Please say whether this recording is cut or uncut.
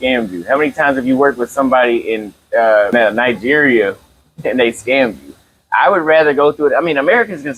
uncut